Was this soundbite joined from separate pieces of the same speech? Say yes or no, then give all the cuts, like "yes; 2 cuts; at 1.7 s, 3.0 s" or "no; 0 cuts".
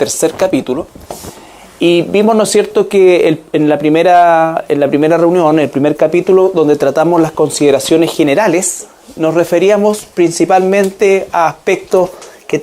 yes; 1 cut; at 7.5 s